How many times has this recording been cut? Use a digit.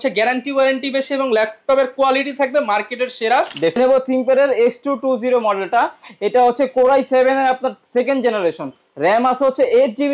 1